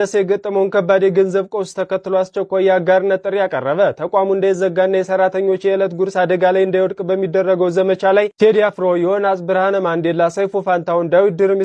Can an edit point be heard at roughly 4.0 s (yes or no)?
no